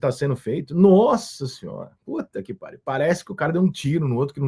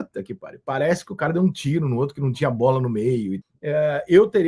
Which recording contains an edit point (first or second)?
second